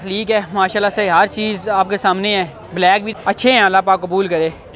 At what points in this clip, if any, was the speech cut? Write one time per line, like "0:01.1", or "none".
0:03.1